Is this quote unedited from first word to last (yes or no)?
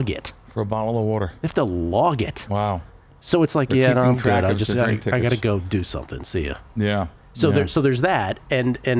yes